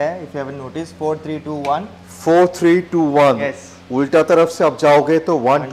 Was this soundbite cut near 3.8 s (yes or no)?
no